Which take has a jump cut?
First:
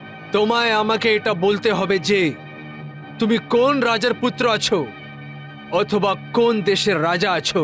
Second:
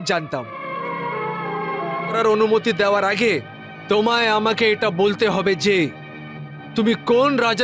second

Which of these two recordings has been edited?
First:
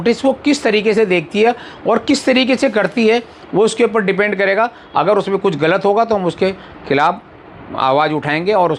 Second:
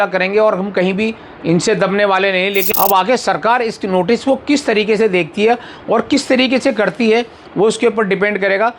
second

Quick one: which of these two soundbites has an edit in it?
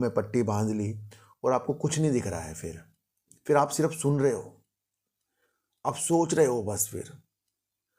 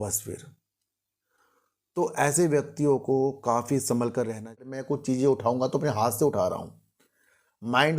second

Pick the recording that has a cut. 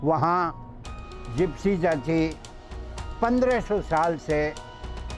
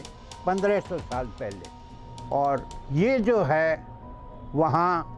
second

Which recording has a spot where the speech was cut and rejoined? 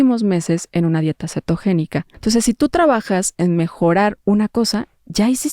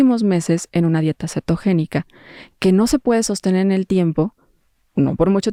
first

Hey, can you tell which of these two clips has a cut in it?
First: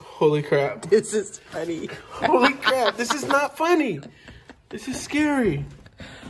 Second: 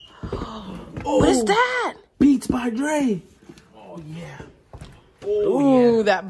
second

